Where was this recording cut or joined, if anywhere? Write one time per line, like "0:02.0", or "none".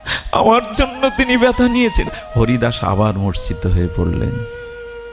0:02.2